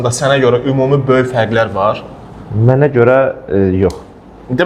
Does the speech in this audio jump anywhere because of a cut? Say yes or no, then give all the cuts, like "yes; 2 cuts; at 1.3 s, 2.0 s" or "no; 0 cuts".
no; 0 cuts